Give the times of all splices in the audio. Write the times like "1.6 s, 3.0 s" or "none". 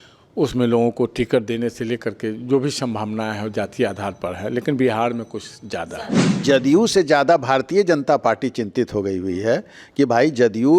6.4 s